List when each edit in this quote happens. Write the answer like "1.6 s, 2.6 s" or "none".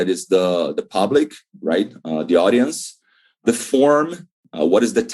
3.4 s